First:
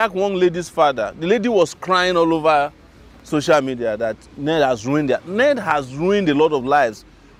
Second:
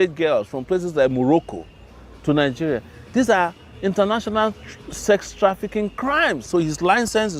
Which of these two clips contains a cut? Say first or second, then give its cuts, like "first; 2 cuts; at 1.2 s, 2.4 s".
second; 1 cut; at 6.5 s